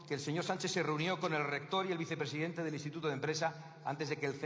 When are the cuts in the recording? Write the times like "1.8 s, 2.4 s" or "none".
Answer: none